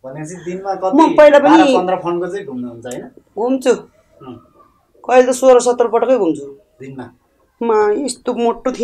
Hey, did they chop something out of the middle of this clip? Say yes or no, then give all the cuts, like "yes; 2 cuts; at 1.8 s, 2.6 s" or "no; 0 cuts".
no; 0 cuts